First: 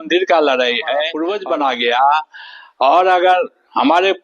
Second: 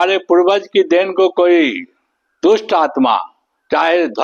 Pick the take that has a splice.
first; 1 cut; at 1.2 s

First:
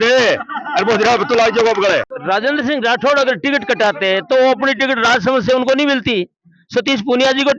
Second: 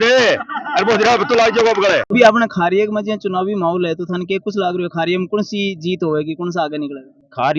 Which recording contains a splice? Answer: first; 1 cut; at 2.0 s

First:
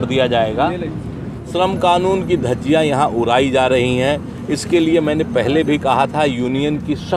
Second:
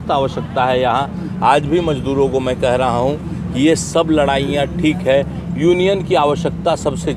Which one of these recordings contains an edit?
first; 1 cut; at 1.5 s

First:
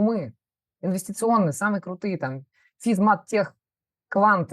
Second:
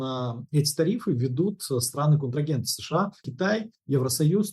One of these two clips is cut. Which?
second; 1 cut; at 3.3 s

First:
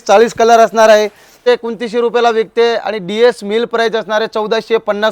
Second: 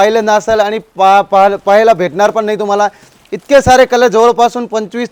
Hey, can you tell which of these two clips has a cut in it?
first; 1 cut; at 1.3 s

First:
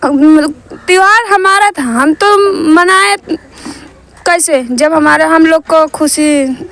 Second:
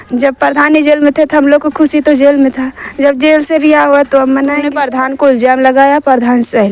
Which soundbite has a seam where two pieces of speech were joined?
second; 1 cut; at 4.8 s

